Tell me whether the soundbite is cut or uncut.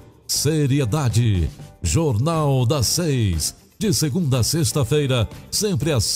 uncut